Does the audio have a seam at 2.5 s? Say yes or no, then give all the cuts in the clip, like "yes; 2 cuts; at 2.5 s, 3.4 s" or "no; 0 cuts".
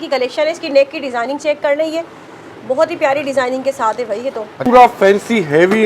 no; 1 cut; at 4.7 s